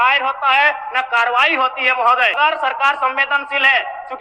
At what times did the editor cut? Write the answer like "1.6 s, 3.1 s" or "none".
2.4 s